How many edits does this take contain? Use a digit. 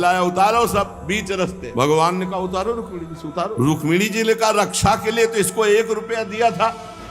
2